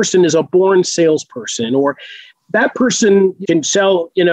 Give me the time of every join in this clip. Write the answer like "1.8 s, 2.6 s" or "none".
3.4 s